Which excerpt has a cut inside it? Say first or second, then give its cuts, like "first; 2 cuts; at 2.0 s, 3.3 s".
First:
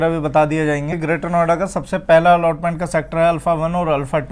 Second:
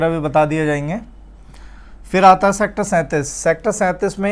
first; 1 cut; at 0.9 s